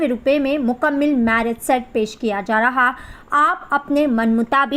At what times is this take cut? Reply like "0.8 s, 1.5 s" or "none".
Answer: none